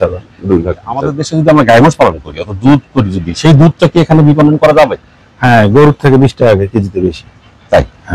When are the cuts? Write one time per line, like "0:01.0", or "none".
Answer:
0:01.2